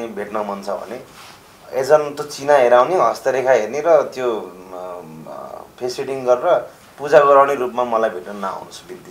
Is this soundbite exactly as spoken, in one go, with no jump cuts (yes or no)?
yes